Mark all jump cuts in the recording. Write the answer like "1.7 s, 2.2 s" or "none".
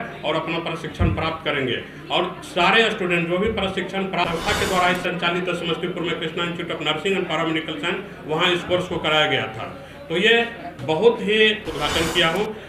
4.2 s, 11.7 s

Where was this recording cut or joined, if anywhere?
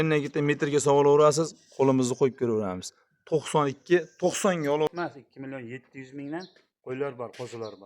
4.9 s

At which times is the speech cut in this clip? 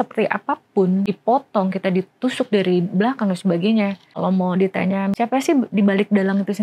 1.1 s, 4.1 s, 5.2 s

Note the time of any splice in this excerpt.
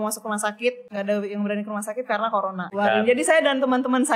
0.9 s, 2.7 s

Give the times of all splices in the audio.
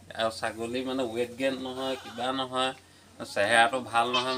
none

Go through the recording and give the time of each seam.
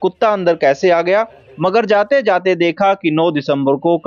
1.5 s

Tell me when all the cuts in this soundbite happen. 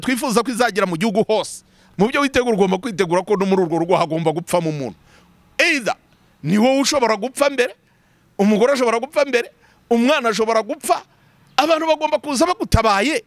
1.9 s

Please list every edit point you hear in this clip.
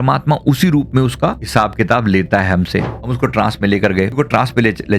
2.9 s

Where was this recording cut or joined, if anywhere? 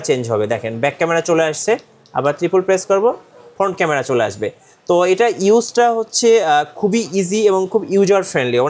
none

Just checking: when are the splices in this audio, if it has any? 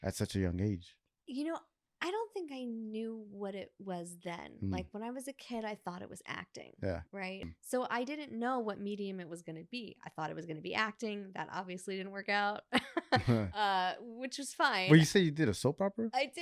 7.5 s

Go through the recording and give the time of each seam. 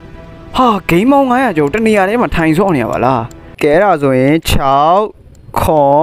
3.4 s

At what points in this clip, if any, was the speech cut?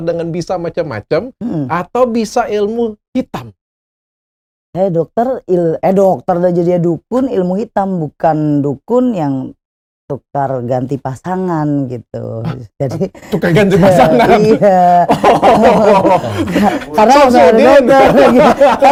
none

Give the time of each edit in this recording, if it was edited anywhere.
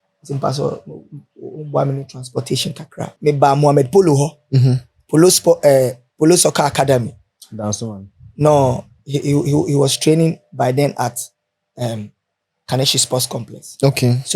3.1 s

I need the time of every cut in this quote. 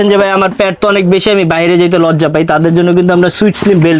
none

